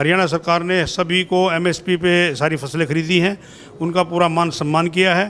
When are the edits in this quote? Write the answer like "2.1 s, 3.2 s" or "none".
none